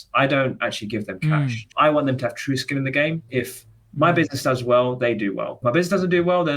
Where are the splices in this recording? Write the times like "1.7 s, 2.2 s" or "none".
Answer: 1.7 s, 3.3 s, 5.6 s